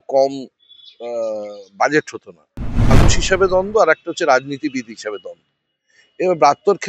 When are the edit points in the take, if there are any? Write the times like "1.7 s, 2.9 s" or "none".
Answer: 2.9 s